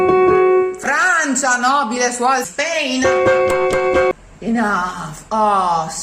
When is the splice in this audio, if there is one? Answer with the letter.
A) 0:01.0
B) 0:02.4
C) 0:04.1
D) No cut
C